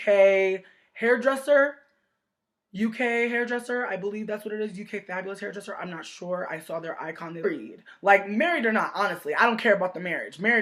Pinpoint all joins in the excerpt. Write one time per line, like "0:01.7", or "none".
none

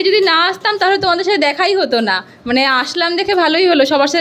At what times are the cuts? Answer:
none

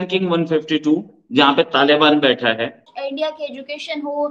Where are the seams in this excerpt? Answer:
0:02.9

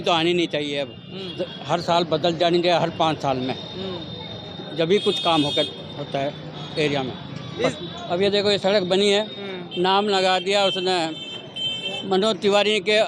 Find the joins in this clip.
none

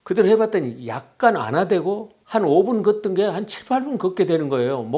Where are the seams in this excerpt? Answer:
none

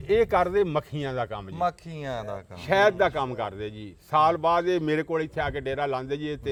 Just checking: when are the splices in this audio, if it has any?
none

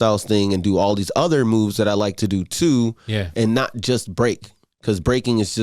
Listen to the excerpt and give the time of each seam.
none

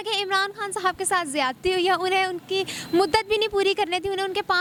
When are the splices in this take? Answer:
none

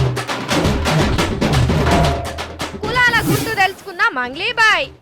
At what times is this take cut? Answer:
0:01.1

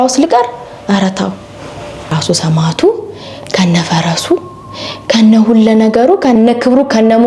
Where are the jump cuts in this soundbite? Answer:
0:01.9

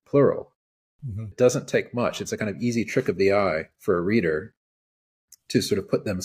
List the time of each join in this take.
0:01.3

